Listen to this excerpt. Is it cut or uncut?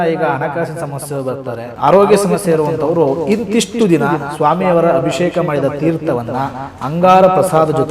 cut